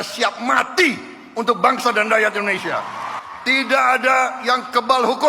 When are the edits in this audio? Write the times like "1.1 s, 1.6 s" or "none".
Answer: 3.1 s